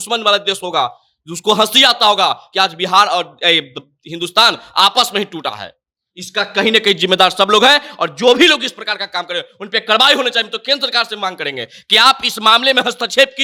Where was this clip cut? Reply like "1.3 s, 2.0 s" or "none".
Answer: none